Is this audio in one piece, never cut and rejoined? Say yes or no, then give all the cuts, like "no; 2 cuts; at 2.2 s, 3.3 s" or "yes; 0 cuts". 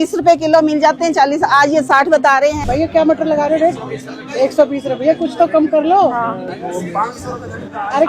no; 1 cut; at 2.6 s